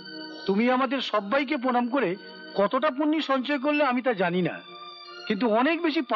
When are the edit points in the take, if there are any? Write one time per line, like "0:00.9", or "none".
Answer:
none